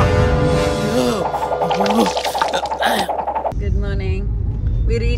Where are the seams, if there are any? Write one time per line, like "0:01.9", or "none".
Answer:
0:03.6